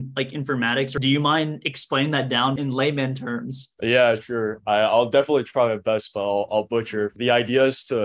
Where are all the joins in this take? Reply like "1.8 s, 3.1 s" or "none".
0.9 s, 2.6 s, 3.6 s, 7.1 s